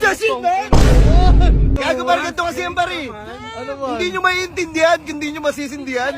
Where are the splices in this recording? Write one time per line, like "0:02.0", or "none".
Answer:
0:01.8